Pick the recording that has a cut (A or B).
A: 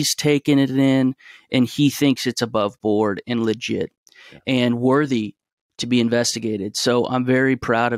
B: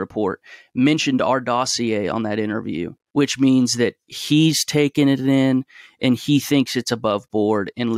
B